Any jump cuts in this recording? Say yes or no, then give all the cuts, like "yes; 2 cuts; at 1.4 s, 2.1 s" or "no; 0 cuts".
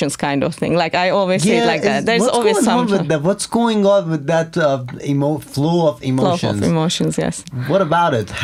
no; 0 cuts